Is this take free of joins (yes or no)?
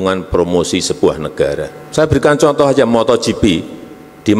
no